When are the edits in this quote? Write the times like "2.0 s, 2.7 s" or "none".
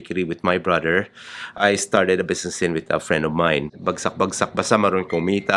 3.7 s

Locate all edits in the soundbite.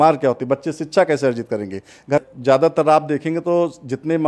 2.2 s

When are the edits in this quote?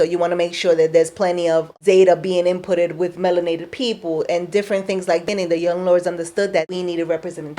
1.7 s, 6.7 s

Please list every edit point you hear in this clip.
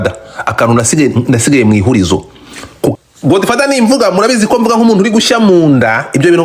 3.0 s

